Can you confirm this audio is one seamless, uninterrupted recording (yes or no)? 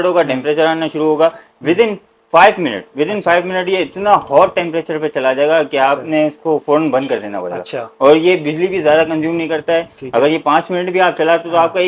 yes